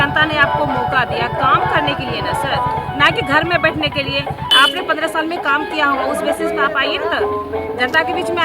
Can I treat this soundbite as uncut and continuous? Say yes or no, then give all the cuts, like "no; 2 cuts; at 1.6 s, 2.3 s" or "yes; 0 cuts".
no; 1 cut; at 4.5 s